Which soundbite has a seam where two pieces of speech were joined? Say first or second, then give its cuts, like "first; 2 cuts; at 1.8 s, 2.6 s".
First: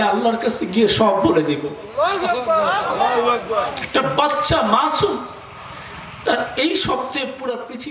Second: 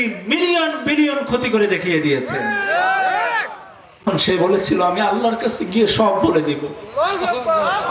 second; 1 cut; at 4.1 s